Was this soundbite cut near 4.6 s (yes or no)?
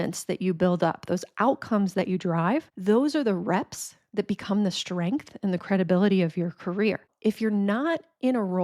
no